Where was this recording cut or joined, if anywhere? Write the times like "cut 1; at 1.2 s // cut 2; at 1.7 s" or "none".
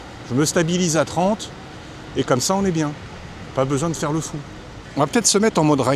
cut 1; at 4.8 s